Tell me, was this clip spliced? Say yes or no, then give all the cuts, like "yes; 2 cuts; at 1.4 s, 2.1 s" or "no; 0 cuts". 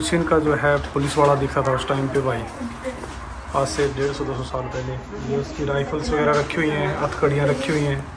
no; 0 cuts